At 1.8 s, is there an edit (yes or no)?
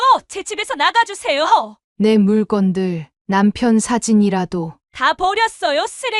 yes